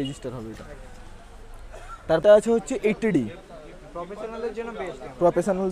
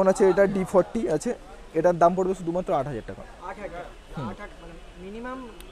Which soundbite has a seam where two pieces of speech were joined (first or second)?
first